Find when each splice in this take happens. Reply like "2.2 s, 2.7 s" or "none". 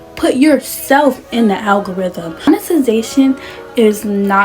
2.5 s

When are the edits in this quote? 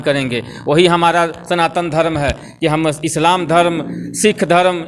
none

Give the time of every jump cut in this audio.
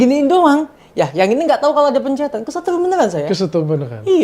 none

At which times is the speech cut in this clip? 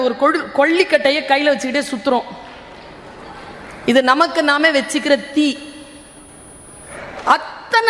6.9 s

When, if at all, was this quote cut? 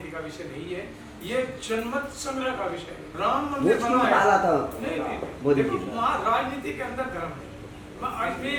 none

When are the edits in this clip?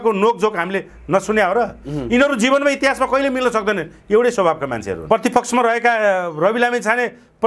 5.1 s

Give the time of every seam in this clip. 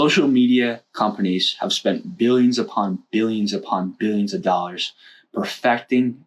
none

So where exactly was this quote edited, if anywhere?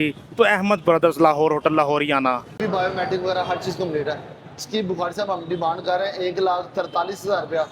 2.6 s

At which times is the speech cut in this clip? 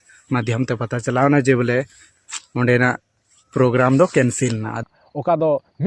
4.7 s

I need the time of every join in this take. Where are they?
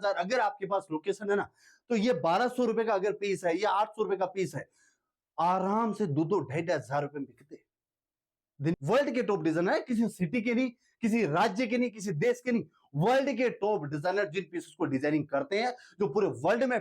8.7 s

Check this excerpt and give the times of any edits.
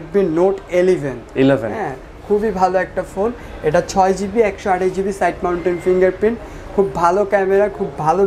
none

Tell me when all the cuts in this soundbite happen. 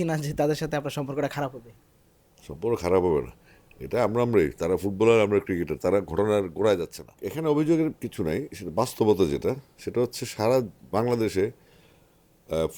7.2 s

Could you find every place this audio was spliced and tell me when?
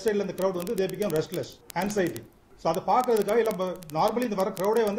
1.6 s

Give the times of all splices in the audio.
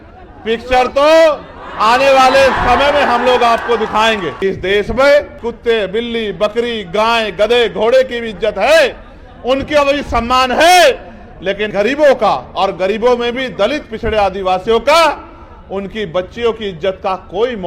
4.3 s, 5.4 s, 11.7 s

